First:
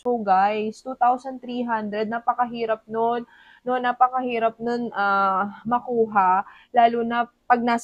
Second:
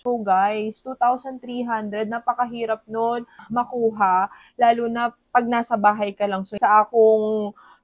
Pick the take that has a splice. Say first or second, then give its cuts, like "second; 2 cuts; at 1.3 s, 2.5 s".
second; 2 cuts; at 3.4 s, 6.5 s